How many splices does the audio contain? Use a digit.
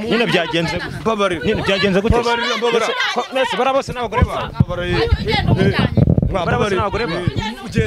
0